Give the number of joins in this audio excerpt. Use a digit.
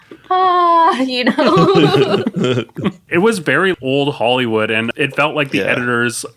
3